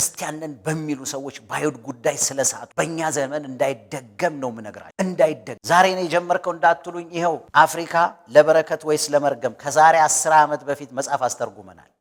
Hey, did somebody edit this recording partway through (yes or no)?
no